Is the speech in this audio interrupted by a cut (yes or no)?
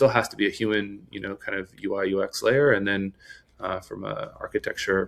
no